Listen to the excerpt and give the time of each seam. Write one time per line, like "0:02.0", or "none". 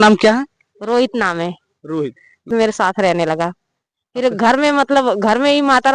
0:02.5